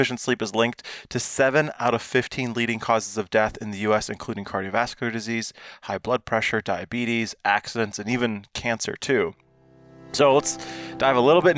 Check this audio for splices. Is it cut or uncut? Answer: uncut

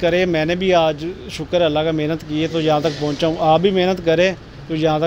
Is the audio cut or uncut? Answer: uncut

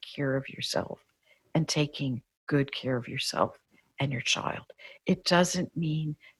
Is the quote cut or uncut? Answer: uncut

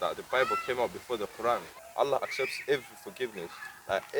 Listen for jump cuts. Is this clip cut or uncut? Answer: cut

